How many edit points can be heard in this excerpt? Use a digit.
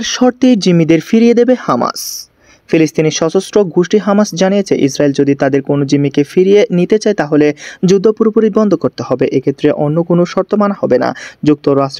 0